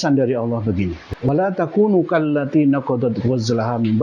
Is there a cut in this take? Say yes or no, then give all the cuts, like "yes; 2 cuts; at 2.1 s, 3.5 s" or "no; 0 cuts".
yes; 1 cut; at 1.1 s